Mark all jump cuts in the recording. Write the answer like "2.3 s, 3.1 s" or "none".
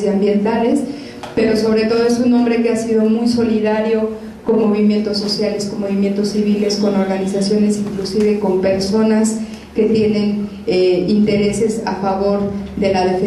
7.9 s